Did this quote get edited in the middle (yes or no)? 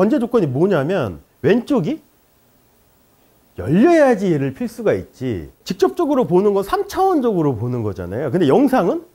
yes